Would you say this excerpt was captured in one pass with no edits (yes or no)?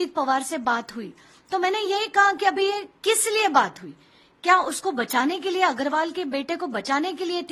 yes